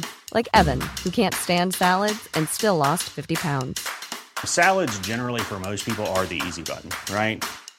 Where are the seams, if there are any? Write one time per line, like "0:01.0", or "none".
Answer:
none

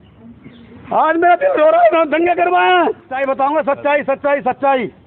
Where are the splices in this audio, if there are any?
0:03.1

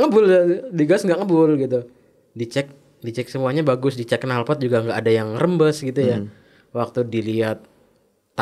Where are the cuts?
none

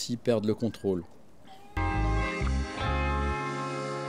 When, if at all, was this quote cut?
0:01.6

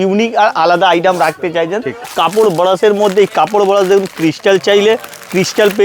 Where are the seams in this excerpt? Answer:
0:02.1

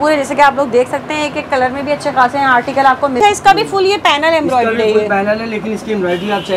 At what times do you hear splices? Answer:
0:03.2

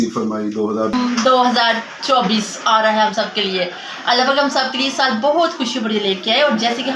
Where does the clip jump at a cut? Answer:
0:00.9

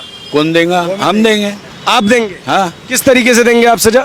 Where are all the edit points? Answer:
none

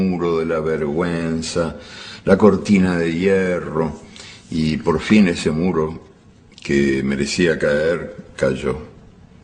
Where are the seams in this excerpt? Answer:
0:08.0

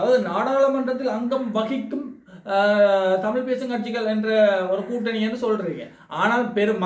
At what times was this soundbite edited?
none

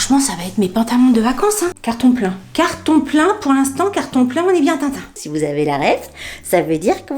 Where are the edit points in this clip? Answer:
0:01.8
0:05.1

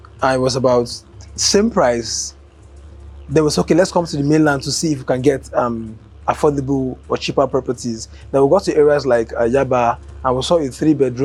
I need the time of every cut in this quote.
none

